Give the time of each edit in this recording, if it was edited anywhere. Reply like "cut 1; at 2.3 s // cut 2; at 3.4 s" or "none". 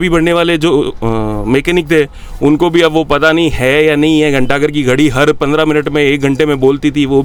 none